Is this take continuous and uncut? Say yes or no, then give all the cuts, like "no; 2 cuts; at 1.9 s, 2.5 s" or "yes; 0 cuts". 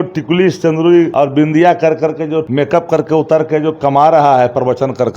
no; 2 cuts; at 1.1 s, 2.5 s